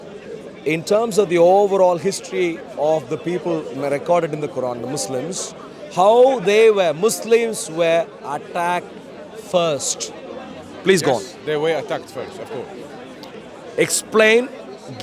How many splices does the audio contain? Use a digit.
0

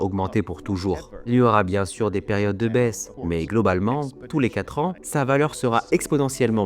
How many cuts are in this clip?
2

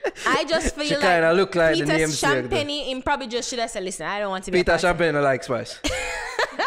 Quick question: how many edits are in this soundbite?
0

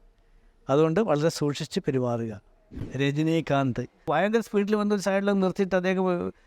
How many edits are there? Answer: 2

